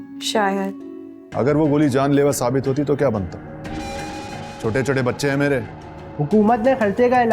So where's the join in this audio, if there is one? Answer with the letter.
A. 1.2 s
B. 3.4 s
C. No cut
A